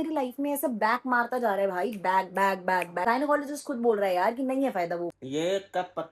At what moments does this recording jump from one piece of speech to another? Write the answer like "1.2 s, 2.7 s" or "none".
3.0 s, 5.2 s